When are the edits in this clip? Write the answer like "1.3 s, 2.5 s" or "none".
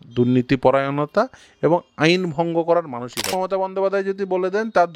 3.3 s